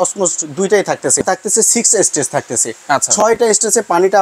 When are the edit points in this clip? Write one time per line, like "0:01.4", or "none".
0:01.2